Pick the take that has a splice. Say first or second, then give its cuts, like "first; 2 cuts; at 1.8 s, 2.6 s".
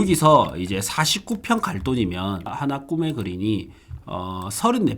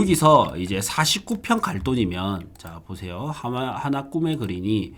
first; 1 cut; at 2.5 s